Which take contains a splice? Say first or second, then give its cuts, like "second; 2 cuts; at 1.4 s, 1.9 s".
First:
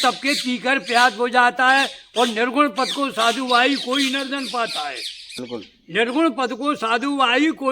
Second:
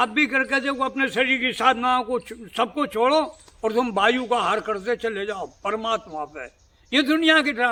first; 1 cut; at 5.4 s